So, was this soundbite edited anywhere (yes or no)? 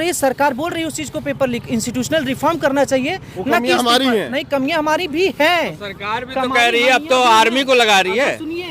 no